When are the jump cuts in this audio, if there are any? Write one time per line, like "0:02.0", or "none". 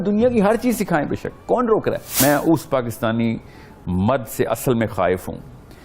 0:02.2